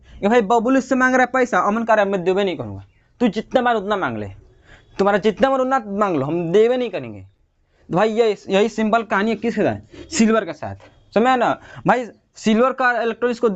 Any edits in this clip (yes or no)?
no